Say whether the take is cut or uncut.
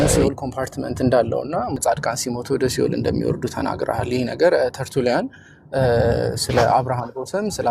cut